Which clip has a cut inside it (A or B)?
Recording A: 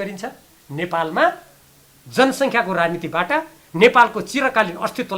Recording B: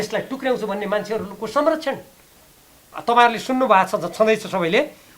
B